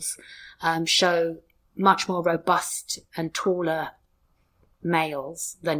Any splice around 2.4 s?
no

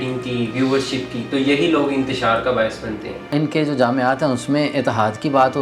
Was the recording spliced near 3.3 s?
yes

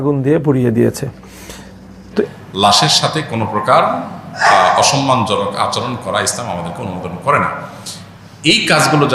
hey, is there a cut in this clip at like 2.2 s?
yes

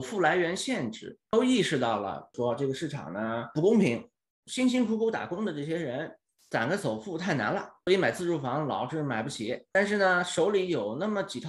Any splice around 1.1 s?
yes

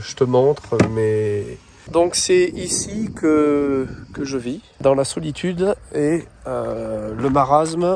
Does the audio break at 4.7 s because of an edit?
yes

